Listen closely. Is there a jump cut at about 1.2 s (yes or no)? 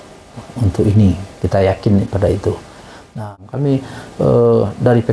no